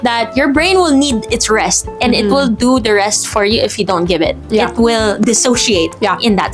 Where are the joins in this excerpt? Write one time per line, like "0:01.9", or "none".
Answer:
none